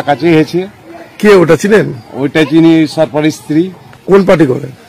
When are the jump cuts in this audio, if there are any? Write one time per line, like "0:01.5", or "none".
0:03.9